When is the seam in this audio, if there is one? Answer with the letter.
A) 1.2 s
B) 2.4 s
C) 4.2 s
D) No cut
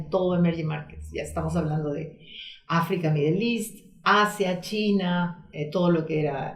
D